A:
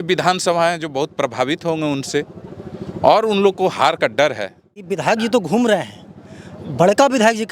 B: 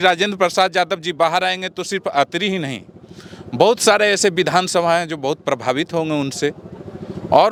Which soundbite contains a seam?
A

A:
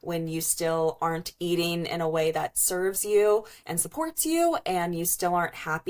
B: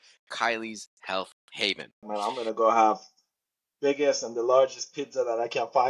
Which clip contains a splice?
B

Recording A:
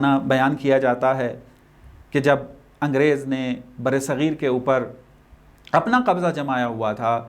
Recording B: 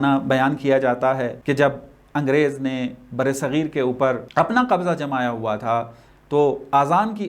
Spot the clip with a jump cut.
B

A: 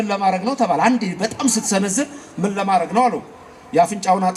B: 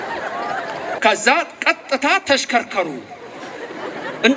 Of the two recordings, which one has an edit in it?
B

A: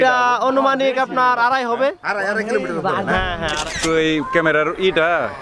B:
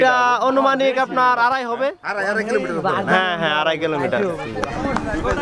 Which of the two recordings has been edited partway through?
A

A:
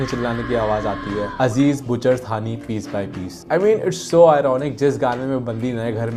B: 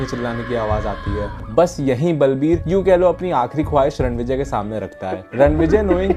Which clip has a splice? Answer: B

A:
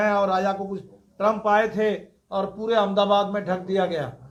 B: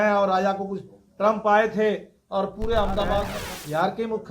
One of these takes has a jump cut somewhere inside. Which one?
B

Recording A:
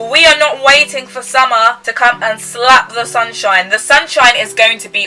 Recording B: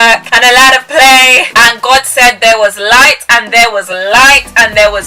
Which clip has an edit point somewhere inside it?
B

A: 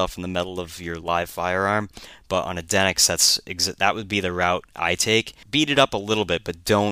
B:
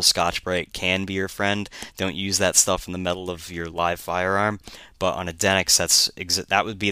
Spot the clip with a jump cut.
A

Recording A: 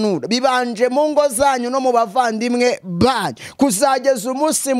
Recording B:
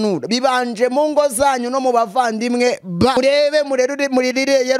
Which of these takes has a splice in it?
B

